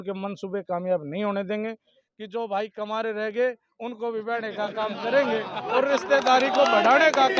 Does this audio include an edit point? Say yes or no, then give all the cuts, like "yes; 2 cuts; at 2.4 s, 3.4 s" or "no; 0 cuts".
yes; 1 cut; at 2.0 s